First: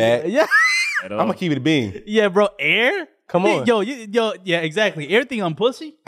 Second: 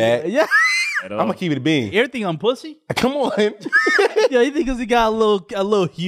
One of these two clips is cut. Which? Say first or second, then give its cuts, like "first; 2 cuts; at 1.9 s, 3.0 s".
second; 2 cuts; at 1.9 s, 4.3 s